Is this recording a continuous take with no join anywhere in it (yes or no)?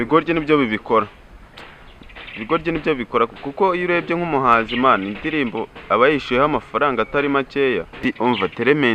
no